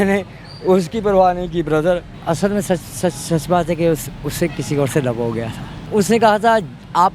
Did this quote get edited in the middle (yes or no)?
yes